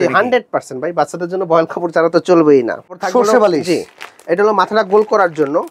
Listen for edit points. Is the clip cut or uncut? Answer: cut